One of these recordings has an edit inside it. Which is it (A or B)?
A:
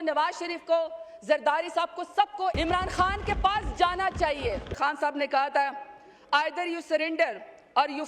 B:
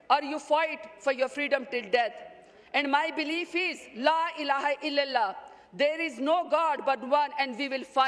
A